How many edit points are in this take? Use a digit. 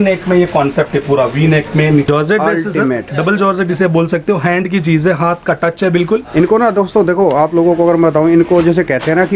1